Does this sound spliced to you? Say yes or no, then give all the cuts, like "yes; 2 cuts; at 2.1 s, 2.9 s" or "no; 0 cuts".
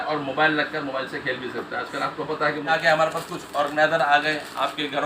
yes; 1 cut; at 2.7 s